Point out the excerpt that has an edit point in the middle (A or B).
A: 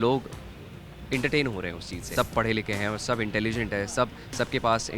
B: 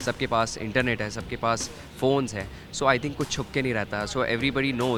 A